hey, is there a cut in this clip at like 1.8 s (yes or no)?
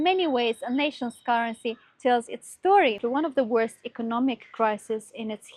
no